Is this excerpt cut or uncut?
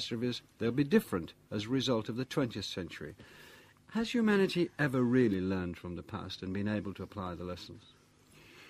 cut